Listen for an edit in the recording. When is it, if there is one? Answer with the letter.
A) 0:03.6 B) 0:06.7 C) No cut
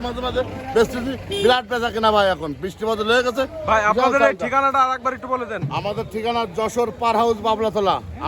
C